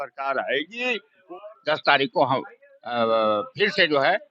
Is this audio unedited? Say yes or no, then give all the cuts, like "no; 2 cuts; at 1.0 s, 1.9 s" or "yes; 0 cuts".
no; 1 cut; at 1.2 s